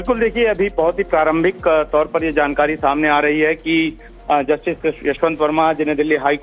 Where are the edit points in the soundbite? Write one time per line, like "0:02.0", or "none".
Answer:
none